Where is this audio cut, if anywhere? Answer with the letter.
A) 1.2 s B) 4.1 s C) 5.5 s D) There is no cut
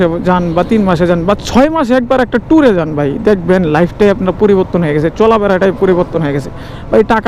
D